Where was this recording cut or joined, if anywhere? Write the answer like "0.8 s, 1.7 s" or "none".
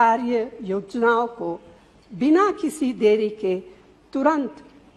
none